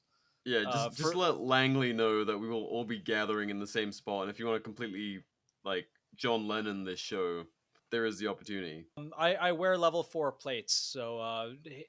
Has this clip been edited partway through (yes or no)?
yes